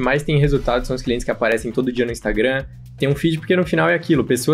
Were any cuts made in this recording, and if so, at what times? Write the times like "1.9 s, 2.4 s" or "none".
none